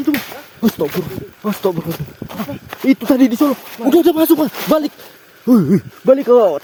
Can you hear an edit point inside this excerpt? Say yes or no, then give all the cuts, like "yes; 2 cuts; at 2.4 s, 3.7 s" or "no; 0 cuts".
no; 0 cuts